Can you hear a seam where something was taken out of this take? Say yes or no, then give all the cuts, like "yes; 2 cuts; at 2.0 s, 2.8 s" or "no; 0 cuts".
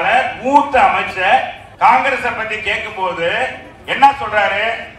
yes; 1 cut; at 1.6 s